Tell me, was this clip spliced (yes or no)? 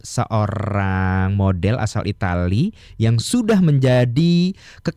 no